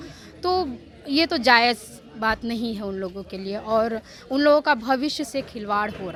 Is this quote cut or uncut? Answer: uncut